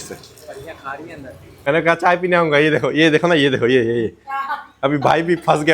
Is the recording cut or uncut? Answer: cut